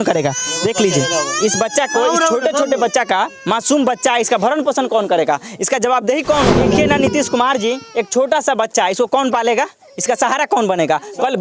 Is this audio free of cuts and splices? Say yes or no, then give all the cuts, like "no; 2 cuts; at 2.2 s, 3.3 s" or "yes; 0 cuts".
no; 1 cut; at 6.6 s